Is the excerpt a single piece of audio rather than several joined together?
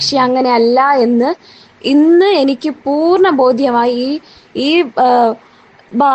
yes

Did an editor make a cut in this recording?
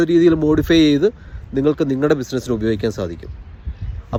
no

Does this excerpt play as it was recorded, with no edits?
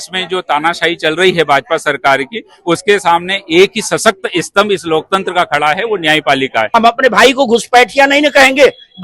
no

